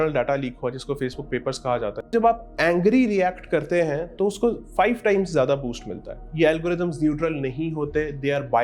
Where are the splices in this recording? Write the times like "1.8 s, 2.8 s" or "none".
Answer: 2.1 s, 6.2 s